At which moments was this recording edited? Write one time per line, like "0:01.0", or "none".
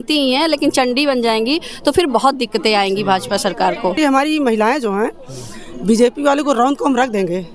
0:04.0